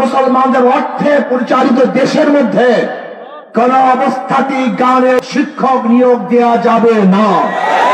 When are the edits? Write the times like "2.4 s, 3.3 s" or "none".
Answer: 5.2 s